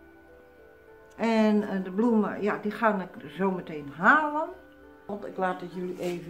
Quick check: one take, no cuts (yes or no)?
no